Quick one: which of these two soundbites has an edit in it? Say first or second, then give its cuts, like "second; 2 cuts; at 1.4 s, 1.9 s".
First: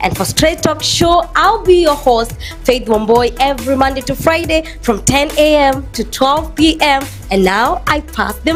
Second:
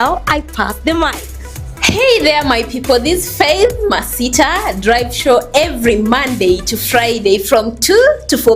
second; 1 cut; at 4.3 s